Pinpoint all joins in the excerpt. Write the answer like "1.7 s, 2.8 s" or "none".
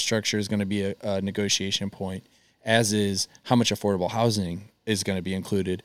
none